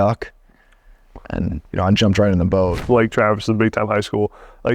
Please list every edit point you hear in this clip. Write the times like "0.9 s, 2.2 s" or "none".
2.8 s